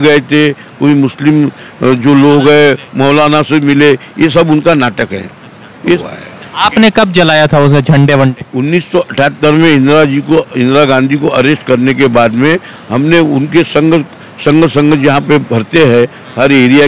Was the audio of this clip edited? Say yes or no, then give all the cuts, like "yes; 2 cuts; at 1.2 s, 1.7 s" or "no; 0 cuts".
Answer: yes; 1 cut; at 6.0 s